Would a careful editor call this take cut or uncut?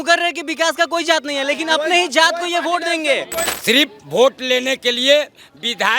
cut